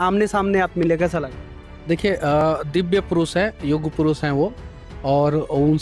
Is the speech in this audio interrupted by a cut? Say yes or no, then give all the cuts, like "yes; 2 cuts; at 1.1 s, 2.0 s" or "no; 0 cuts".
no; 0 cuts